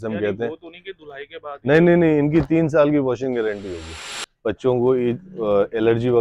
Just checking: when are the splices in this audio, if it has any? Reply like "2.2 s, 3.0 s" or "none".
4.2 s